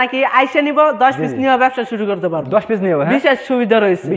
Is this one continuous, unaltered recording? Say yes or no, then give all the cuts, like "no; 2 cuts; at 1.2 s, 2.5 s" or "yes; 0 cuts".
yes; 0 cuts